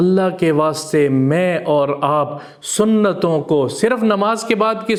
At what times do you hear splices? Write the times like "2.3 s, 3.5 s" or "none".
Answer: none